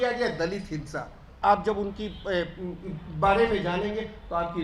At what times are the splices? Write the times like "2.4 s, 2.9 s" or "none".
1.4 s